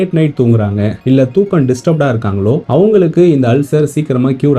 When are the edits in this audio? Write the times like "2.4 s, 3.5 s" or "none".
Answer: 0.9 s, 2.6 s